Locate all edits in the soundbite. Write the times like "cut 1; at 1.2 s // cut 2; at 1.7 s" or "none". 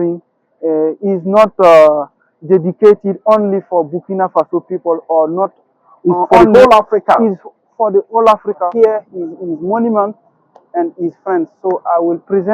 cut 1; at 8.6 s